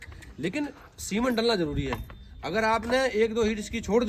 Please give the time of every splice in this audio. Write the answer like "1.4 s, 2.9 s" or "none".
none